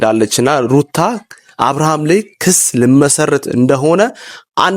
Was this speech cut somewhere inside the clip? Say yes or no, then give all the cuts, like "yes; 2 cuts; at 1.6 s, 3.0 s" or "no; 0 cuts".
no; 0 cuts